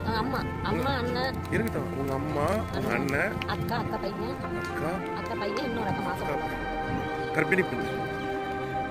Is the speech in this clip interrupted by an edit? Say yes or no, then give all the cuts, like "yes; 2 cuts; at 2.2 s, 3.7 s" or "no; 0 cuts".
no; 0 cuts